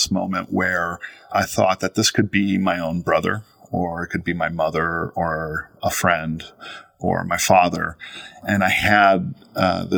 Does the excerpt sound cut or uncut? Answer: cut